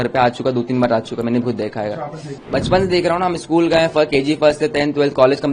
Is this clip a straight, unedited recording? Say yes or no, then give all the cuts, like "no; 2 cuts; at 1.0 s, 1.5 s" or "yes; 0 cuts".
no; 1 cut; at 2.4 s